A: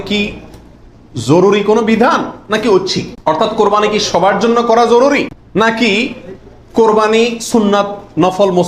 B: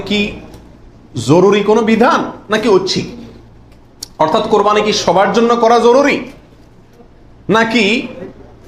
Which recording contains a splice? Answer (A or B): A